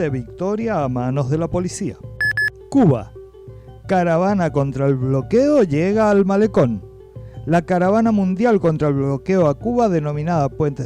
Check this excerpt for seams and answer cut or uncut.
cut